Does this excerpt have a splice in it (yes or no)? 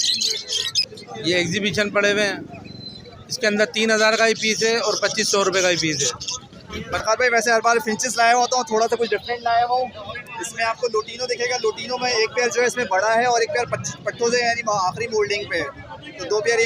yes